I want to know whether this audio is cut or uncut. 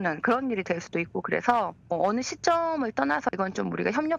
cut